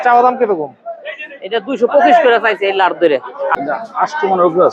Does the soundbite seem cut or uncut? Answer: cut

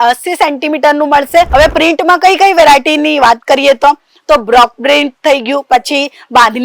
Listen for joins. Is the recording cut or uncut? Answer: cut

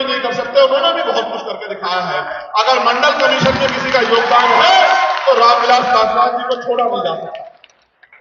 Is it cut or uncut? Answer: uncut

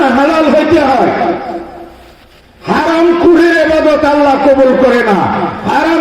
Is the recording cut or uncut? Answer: uncut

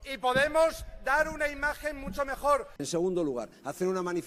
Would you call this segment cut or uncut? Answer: cut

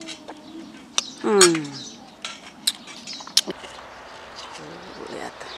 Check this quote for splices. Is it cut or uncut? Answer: cut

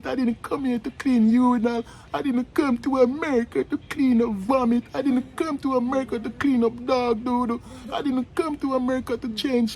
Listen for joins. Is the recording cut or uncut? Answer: cut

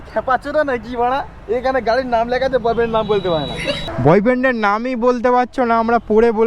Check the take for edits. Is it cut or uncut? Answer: cut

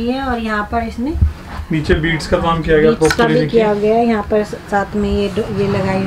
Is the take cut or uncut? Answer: uncut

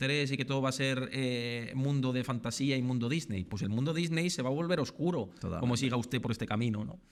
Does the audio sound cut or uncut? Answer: uncut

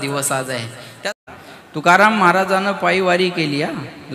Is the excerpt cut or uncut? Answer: cut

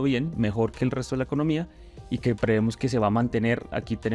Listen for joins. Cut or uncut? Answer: uncut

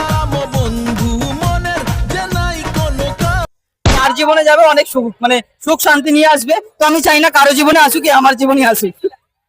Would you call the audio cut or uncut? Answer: cut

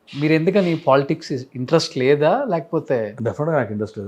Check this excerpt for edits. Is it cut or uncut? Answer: uncut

